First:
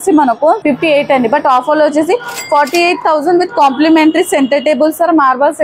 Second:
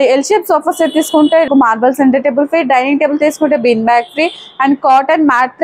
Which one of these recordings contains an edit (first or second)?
second